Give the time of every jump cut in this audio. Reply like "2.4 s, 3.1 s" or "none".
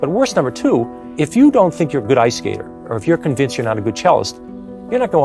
1.0 s